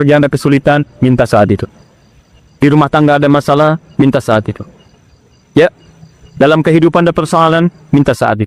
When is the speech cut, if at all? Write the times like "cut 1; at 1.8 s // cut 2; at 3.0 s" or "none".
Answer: none

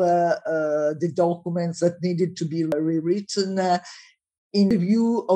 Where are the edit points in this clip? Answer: cut 1; at 2.7 s // cut 2; at 4.7 s

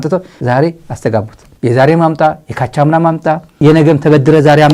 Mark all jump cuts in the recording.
none

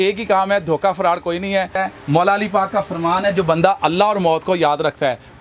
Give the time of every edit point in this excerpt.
cut 1; at 1.8 s

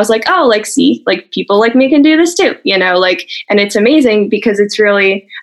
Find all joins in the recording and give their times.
none

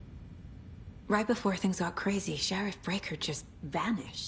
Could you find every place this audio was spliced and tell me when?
cut 1; at 1.1 s

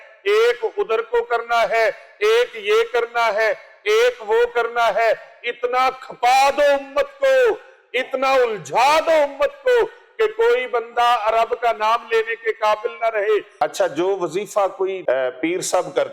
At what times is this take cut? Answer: cut 1; at 13.5 s // cut 2; at 15.0 s

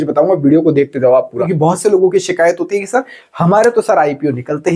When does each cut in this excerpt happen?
cut 1; at 1.4 s

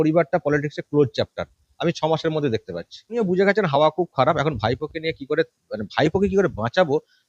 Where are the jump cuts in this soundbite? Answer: cut 1; at 3.1 s

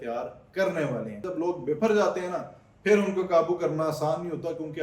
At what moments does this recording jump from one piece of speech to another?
cut 1; at 1.3 s

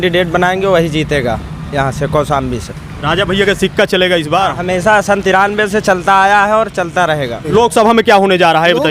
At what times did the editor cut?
cut 1; at 7.5 s

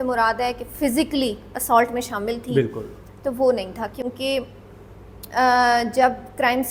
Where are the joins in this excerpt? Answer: none

